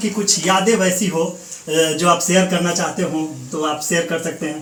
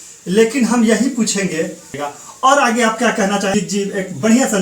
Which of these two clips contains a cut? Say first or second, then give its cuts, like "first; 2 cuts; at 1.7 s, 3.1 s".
second; 2 cuts; at 2.0 s, 3.5 s